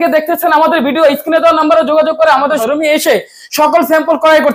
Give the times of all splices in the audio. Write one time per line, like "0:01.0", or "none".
0:02.6